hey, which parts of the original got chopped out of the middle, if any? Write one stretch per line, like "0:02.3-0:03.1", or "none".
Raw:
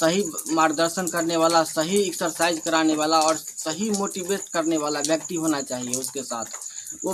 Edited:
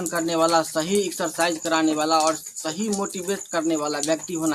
none